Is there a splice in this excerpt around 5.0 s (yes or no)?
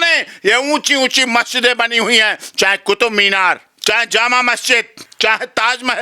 yes